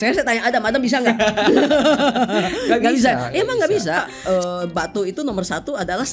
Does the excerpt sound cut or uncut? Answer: cut